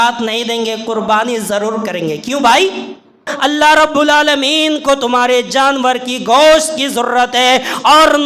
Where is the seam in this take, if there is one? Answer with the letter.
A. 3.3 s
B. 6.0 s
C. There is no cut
A